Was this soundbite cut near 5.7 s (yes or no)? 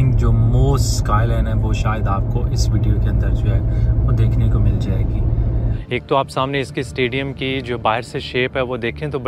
yes